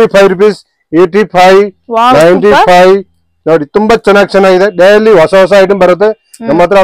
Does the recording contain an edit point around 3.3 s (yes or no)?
no